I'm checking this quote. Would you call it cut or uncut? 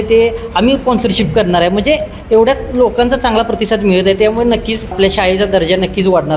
cut